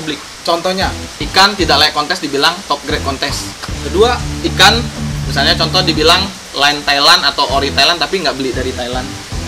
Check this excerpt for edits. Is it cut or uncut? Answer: cut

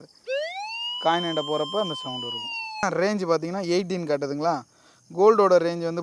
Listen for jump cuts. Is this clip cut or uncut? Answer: cut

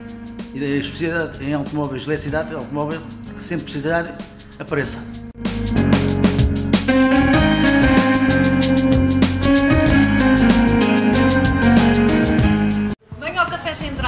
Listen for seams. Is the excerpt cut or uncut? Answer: cut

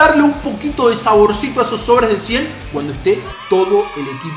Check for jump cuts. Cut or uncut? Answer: uncut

